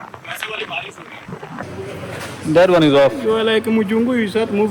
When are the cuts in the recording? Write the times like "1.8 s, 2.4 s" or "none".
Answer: 1.7 s